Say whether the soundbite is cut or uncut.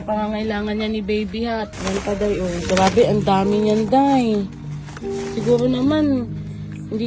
cut